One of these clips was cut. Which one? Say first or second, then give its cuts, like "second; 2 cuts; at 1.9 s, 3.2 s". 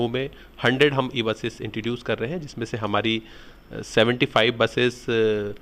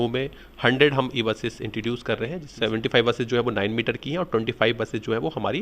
second; 1 cut; at 2.4 s